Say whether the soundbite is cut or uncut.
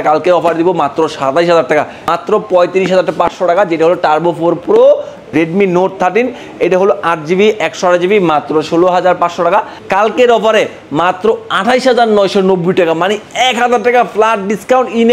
cut